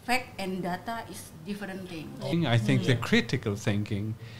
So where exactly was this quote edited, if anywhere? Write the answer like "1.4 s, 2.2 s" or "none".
2.3 s